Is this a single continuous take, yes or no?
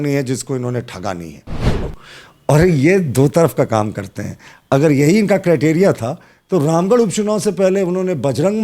no